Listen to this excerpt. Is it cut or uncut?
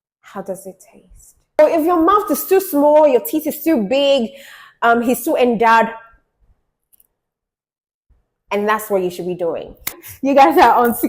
cut